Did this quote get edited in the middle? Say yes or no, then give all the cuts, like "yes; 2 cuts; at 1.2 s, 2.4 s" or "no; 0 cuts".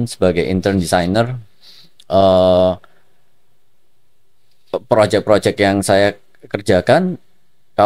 no; 0 cuts